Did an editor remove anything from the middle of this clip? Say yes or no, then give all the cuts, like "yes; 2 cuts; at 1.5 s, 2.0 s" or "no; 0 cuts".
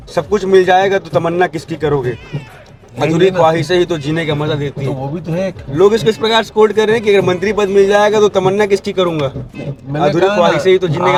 no; 0 cuts